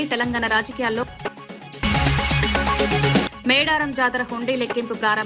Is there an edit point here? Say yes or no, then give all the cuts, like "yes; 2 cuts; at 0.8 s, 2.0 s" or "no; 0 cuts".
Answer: yes; 2 cuts; at 1.0 s, 3.2 s